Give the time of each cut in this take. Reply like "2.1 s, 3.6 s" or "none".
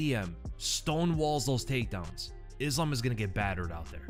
none